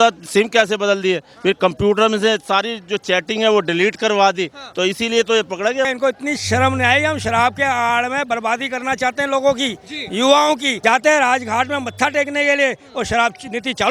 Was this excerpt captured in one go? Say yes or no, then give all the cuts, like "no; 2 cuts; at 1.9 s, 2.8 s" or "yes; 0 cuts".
no; 2 cuts; at 5.9 s, 10.7 s